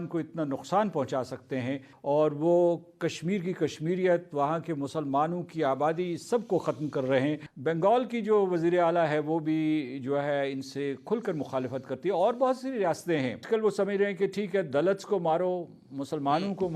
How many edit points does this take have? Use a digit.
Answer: 3